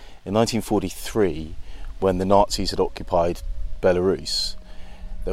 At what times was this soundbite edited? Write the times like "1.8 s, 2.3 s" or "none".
none

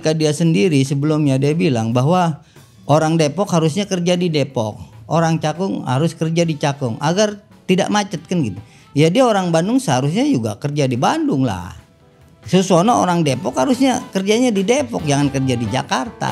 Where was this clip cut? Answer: none

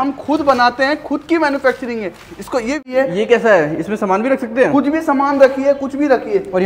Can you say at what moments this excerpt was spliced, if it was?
2.9 s

